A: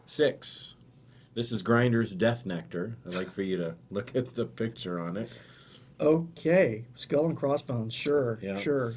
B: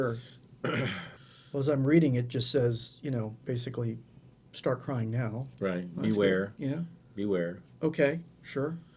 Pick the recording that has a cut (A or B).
B